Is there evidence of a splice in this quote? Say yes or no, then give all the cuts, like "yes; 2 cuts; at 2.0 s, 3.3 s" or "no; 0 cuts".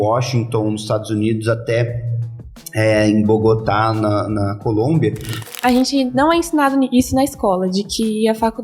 yes; 1 cut; at 5.5 s